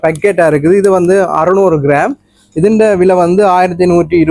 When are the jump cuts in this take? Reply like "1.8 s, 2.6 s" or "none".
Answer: none